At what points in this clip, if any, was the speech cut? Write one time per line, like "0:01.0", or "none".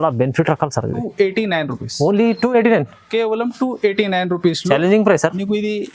0:01.0